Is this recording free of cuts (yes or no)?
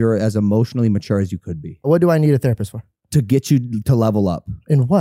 no